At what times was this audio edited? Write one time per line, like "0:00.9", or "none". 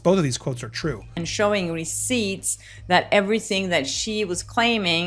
0:01.2